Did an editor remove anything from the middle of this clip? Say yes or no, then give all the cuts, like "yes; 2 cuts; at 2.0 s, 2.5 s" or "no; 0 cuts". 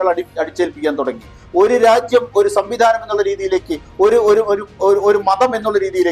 no; 0 cuts